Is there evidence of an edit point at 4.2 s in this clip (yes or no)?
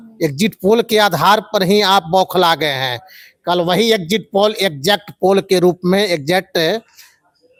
no